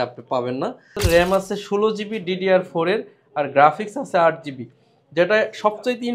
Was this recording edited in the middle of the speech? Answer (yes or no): yes